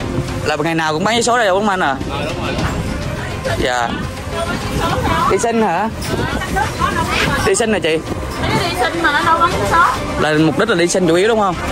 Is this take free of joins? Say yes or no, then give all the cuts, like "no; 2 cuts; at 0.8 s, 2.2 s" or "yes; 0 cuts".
yes; 0 cuts